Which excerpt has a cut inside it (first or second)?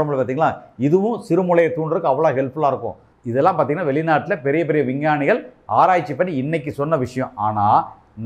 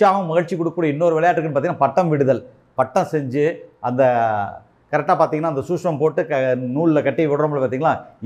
first